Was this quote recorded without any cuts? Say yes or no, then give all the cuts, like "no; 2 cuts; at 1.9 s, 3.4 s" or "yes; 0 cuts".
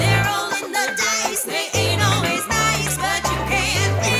yes; 0 cuts